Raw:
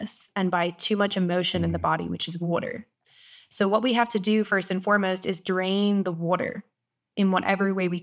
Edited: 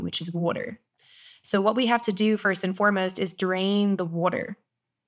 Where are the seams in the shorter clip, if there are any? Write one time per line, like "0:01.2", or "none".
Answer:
none